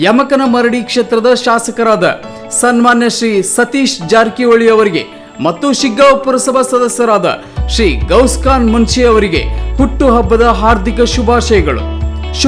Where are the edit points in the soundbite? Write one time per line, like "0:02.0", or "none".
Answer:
none

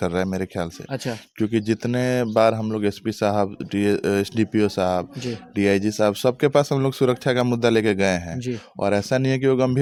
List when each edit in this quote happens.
none

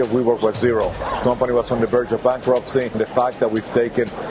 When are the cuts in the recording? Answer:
0:02.9

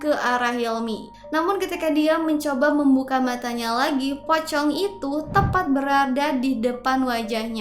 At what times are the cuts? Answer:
0:01.1

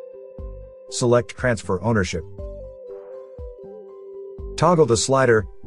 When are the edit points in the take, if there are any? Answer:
0:01.0
0:02.4
0:04.6

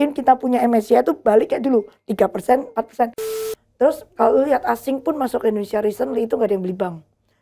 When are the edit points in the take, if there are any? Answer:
0:03.4

